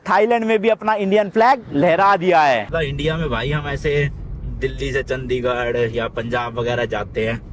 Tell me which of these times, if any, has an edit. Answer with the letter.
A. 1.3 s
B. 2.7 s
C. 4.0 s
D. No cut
B